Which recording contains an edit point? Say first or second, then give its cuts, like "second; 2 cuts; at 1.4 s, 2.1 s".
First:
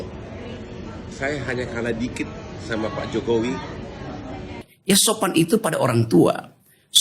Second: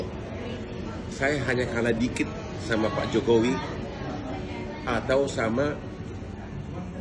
first; 1 cut; at 4.7 s